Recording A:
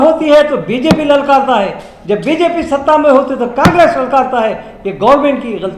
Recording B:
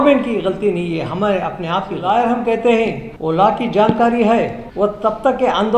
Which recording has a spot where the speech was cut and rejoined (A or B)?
B